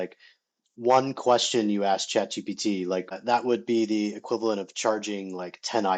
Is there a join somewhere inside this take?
yes; 1 cut; at 3.1 s

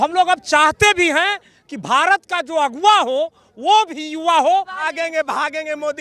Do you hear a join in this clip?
yes; 1 cut; at 4.8 s

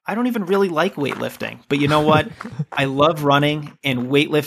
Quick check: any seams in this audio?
no; 0 cuts

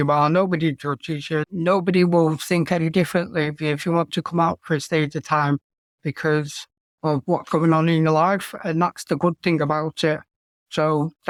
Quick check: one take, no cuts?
yes; 0 cuts

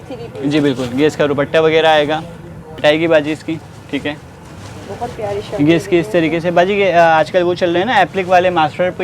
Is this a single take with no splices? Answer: no; 1 cut; at 2.8 s

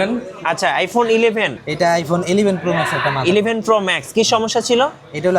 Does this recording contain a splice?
yes; 1 cut; at 1.5 s

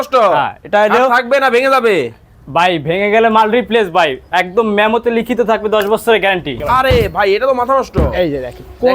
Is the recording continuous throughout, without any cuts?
no; 1 cut; at 6.6 s

